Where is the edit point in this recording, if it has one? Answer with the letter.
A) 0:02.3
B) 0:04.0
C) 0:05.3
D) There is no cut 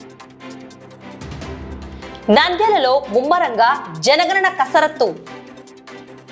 D